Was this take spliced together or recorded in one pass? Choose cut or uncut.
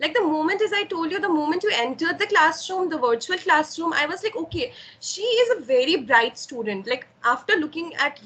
uncut